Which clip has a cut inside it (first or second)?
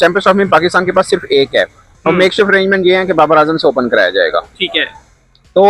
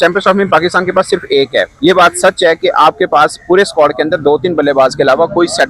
second